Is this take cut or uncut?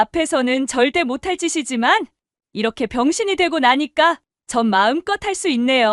uncut